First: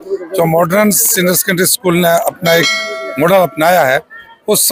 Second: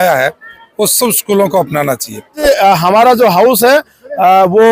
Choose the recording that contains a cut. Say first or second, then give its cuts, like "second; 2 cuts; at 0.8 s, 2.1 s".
second; 1 cut; at 2.4 s